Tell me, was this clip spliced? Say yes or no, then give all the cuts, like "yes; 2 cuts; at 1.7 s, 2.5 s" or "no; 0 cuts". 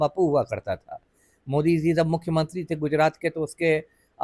no; 0 cuts